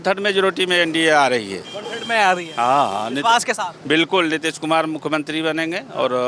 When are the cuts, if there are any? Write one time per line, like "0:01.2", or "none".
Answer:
none